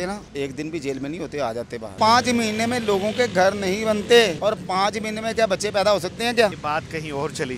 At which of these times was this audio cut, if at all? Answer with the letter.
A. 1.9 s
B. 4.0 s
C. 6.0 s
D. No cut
A